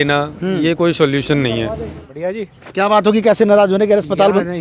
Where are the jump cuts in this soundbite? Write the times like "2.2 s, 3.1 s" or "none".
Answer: 2.0 s